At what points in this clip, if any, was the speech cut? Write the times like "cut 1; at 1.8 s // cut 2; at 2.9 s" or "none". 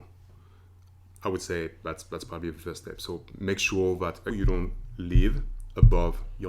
cut 1; at 4.3 s